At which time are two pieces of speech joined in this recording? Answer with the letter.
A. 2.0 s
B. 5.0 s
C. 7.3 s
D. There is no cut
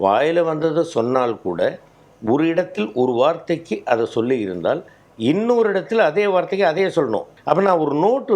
C